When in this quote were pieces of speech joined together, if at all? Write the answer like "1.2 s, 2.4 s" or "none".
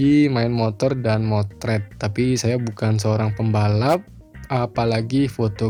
none

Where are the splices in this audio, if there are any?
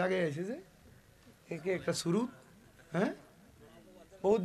none

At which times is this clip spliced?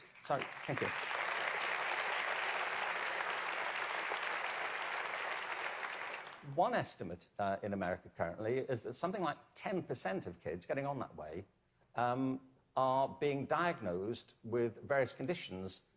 12.6 s

